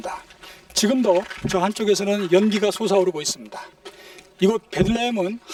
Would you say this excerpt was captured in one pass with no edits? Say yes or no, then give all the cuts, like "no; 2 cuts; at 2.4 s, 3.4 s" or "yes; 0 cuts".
yes; 0 cuts